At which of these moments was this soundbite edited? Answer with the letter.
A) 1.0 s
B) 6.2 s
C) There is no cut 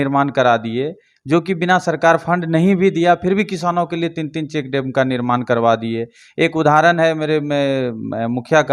C